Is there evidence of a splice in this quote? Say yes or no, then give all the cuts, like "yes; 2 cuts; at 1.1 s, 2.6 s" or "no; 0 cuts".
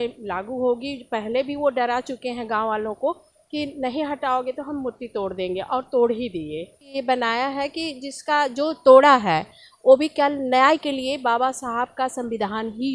yes; 1 cut; at 6.9 s